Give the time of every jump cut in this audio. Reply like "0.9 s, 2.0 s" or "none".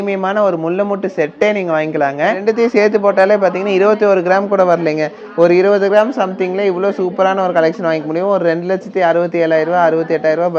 2.4 s